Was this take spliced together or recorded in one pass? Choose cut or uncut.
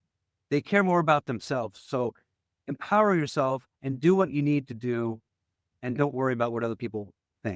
uncut